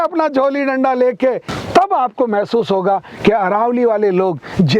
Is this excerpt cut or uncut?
cut